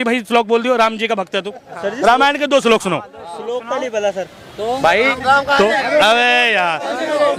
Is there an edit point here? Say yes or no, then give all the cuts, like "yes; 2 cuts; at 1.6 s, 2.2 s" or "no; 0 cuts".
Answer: no; 0 cuts